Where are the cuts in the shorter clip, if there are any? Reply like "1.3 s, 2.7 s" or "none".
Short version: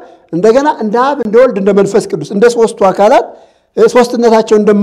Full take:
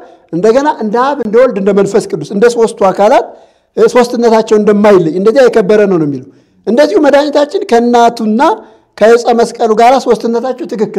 none